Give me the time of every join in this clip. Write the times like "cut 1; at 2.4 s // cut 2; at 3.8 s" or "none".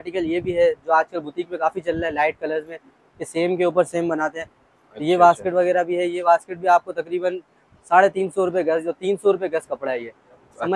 none